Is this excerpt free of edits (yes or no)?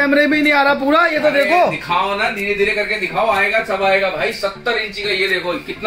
yes